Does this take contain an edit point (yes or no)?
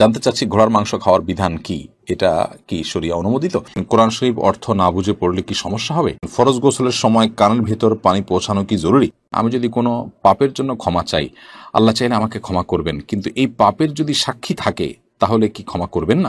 yes